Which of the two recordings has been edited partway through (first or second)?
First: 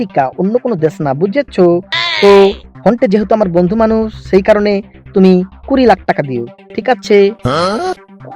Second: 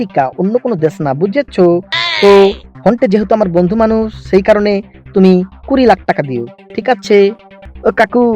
second